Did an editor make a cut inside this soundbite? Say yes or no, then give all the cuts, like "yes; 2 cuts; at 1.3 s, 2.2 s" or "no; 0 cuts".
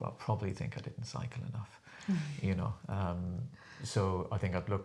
no; 0 cuts